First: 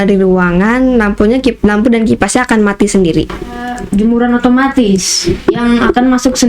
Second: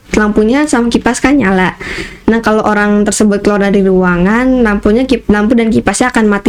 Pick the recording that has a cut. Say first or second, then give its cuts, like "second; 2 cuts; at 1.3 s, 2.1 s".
first; 1 cut; at 3.8 s